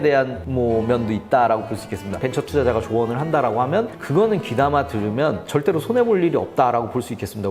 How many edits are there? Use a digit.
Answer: 1